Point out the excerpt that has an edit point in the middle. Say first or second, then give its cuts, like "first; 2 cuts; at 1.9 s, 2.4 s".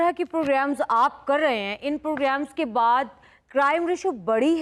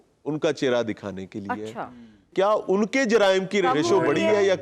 second; 2 cuts; at 2.3 s, 3.6 s